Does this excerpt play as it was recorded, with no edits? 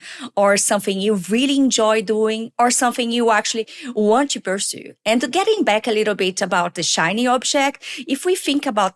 yes; 0 cuts

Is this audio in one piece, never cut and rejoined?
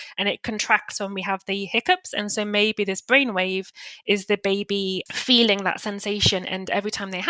no; 1 cut; at 5.0 s

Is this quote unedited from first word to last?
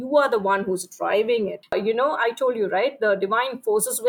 no; 1 cut; at 1.6 s

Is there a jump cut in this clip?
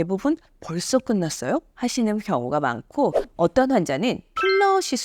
yes; 1 cut; at 3.2 s

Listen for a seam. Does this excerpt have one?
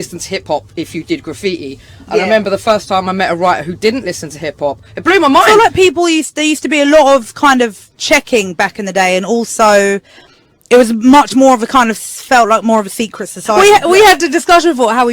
yes; 2 cuts; at 5.5 s, 13.6 s

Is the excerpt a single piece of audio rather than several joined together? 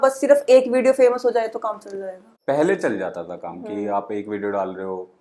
yes; 0 cuts

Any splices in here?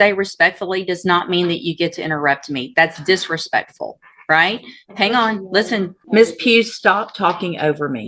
yes; 1 cut; at 6.0 s

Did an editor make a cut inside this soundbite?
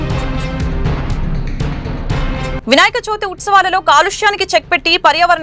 yes; 1 cut; at 2.4 s

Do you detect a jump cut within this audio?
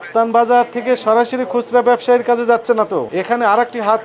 yes; 1 cut; at 3.1 s

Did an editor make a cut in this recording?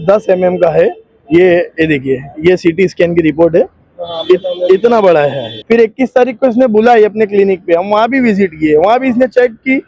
yes; 1 cut; at 5.5 s

